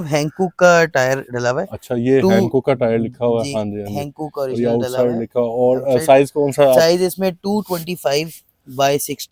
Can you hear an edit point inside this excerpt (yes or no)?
no